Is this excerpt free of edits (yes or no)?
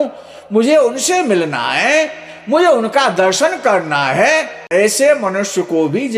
no